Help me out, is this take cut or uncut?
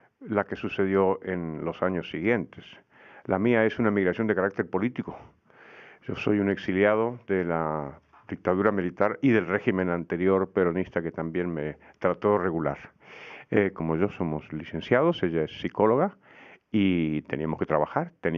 uncut